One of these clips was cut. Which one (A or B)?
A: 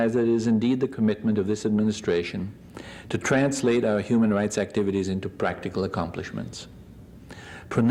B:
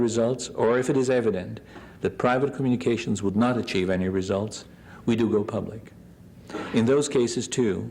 B